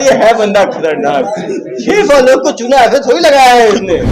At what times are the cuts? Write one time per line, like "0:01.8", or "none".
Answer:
none